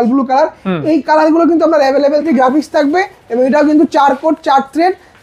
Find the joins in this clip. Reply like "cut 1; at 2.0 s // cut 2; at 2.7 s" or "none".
cut 1; at 2.3 s